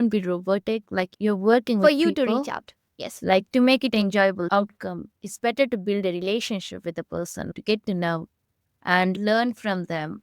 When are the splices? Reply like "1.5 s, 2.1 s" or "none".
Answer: 4.4 s